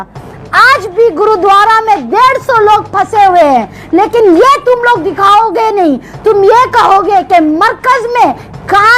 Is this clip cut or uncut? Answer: uncut